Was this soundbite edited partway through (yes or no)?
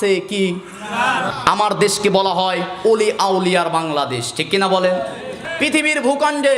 yes